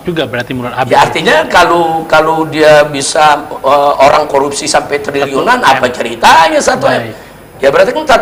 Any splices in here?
no; 0 cuts

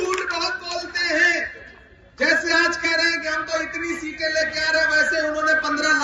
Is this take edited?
no; 0 cuts

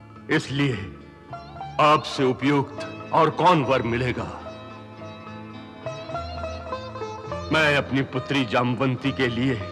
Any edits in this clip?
no; 0 cuts

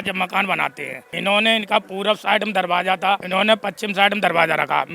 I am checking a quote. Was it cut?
yes; 1 cut; at 3.2 s

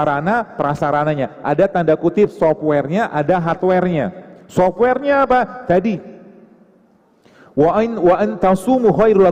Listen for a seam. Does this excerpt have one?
no; 0 cuts

